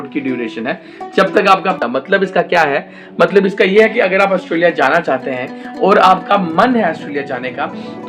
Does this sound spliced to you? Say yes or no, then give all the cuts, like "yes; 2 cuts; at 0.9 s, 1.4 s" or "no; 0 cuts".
yes; 1 cut; at 1.7 s